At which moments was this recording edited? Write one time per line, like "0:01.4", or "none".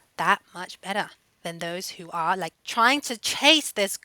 0:02.5